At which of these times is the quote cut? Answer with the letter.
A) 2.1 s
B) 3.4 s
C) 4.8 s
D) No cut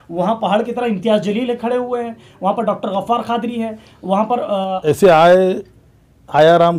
C